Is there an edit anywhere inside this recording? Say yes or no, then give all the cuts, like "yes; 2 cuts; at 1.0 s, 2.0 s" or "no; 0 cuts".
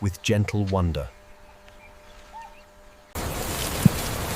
yes; 1 cut; at 3.1 s